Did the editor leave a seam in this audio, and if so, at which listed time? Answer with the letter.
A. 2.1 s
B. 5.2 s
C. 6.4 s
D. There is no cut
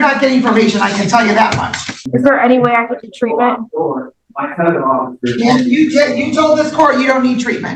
A